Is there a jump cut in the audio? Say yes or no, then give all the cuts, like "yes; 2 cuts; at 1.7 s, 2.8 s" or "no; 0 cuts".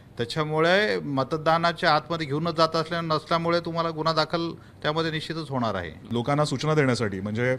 yes; 1 cut; at 6.0 s